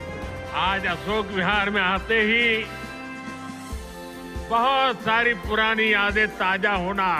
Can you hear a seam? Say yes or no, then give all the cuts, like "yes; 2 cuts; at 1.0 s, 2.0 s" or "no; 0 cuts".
no; 0 cuts